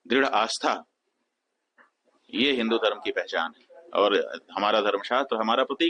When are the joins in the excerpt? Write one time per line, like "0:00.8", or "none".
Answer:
none